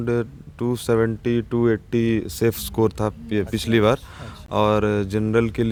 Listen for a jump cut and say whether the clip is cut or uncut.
uncut